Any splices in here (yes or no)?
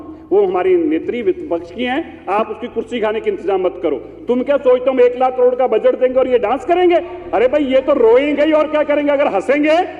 no